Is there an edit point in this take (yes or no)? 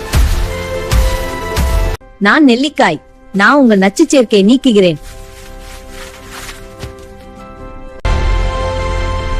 no